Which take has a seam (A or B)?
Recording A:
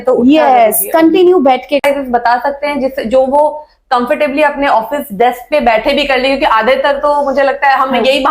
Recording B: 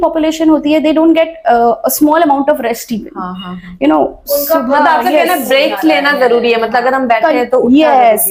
A